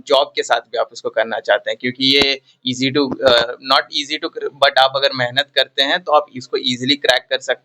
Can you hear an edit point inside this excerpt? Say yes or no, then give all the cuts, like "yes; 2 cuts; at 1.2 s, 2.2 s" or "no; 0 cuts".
no; 0 cuts